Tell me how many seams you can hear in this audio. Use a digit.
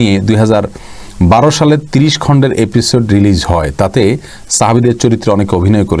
0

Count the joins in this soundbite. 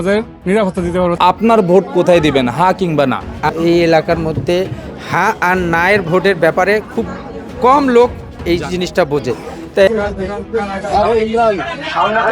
3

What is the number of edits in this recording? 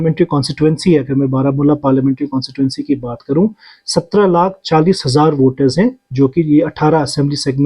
0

